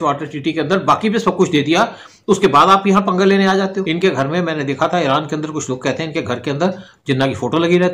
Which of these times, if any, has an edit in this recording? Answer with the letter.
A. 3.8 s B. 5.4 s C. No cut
A